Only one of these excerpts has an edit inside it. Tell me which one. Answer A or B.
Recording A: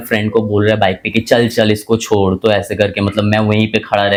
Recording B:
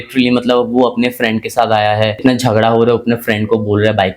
B